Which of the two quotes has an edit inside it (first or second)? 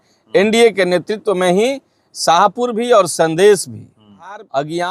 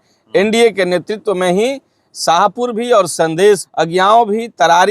second